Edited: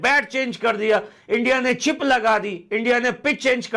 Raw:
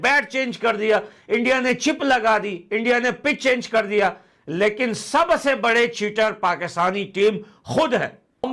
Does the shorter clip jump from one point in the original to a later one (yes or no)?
no